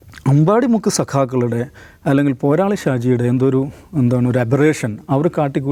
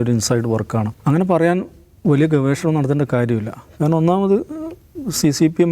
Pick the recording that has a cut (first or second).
second